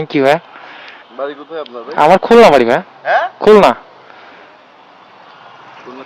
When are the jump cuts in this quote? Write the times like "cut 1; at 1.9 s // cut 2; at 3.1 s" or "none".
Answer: none